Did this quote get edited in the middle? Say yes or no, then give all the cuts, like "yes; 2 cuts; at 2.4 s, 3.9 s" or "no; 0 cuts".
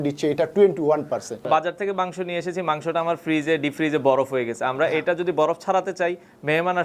yes; 1 cut; at 1.5 s